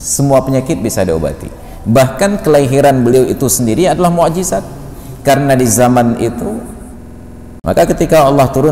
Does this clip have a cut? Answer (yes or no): yes